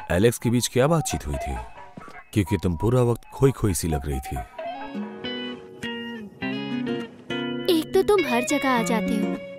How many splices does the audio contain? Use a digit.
2